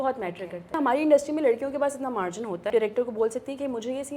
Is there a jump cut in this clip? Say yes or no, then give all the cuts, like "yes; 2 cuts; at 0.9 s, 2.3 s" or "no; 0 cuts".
yes; 2 cuts; at 0.7 s, 2.6 s